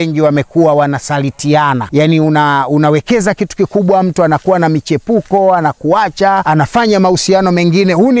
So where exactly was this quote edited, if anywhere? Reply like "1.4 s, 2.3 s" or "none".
1.8 s, 6.4 s